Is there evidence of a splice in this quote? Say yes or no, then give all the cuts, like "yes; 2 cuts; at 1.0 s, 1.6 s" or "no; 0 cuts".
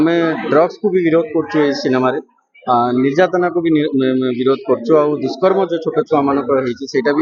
no; 0 cuts